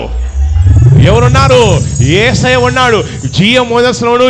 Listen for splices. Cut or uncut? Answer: uncut